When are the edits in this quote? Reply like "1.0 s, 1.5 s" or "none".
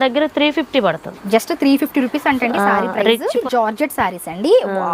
1.2 s, 3.3 s